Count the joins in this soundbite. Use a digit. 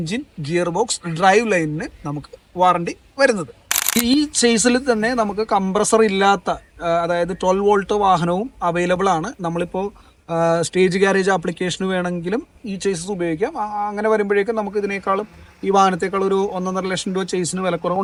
0